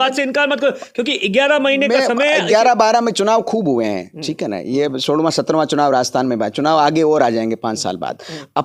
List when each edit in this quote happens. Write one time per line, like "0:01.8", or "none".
none